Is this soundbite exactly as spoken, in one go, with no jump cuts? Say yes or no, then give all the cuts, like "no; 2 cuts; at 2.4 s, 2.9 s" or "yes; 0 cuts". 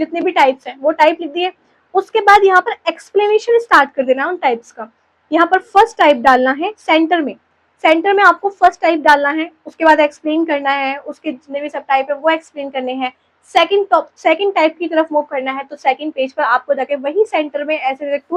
yes; 0 cuts